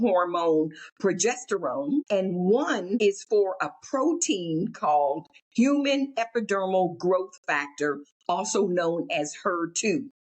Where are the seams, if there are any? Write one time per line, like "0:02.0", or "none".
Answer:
0:02.1
0:03.0